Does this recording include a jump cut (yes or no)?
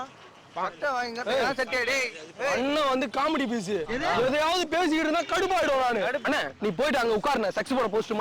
yes